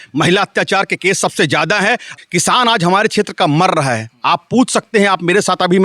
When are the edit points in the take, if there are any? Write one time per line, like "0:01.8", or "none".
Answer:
0:02.1